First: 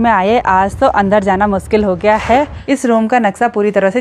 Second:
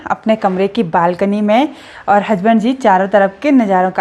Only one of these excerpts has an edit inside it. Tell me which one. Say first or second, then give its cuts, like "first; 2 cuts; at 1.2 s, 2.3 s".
first; 1 cut; at 2.6 s